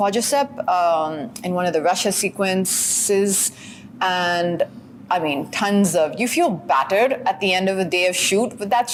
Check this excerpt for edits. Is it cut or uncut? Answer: uncut